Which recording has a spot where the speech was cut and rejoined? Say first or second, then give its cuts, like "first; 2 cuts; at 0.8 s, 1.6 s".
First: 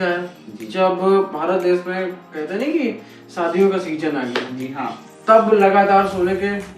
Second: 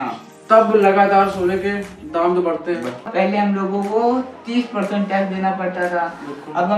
second; 1 cut; at 3.1 s